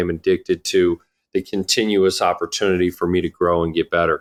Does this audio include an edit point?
no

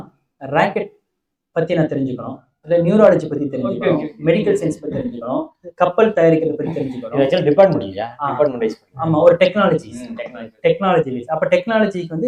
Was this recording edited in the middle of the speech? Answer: no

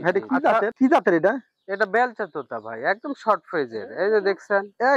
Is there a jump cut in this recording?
no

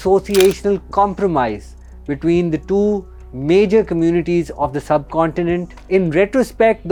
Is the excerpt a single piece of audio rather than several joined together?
yes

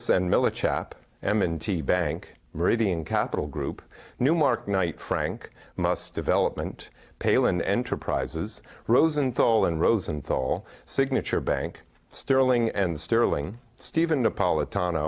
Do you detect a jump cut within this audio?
no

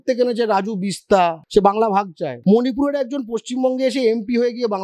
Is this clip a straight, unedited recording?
no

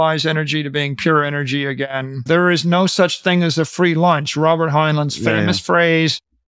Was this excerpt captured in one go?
no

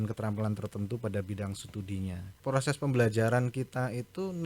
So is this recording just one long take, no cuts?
no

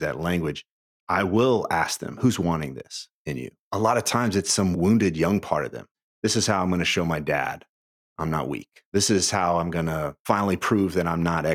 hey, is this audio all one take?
no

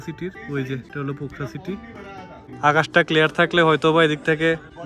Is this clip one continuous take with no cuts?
yes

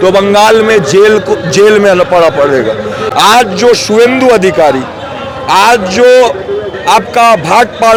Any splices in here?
no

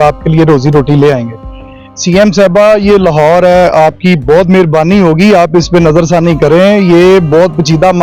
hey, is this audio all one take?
yes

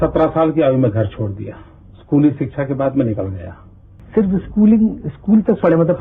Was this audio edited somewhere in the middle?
no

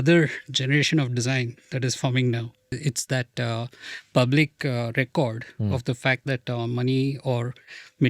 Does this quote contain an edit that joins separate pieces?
yes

